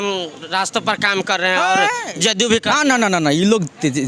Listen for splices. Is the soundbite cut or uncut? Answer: uncut